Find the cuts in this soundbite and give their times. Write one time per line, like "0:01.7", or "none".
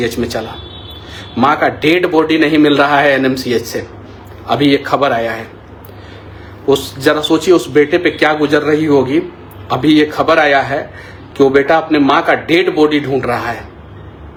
none